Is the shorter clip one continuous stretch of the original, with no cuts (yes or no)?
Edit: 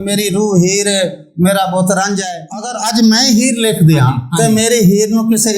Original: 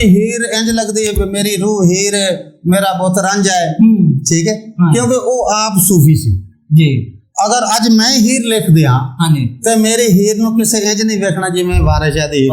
no